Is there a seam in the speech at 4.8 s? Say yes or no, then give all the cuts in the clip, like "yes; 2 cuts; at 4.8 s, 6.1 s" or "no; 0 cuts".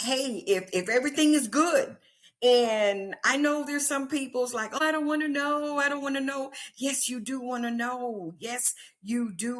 yes; 1 cut; at 4.8 s